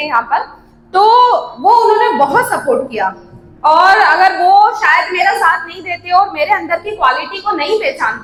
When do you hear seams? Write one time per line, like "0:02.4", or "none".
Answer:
none